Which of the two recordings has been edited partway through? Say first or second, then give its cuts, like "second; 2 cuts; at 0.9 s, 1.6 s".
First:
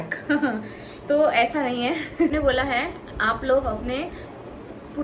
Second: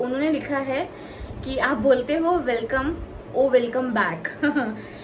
first; 1 cut; at 2.3 s